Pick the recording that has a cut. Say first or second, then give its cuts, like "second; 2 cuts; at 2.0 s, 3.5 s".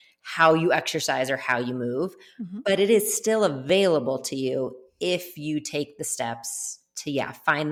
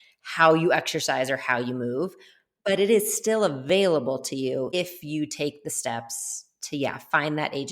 second; 1 cut; at 4.7 s